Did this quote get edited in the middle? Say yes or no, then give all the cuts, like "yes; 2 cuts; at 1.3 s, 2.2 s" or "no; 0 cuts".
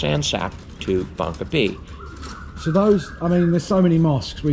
no; 0 cuts